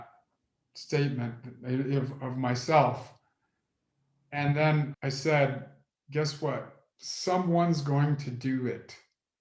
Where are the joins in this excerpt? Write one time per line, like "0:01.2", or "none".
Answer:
0:04.9